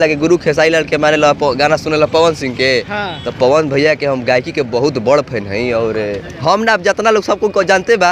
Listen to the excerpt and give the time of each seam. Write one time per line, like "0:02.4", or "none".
none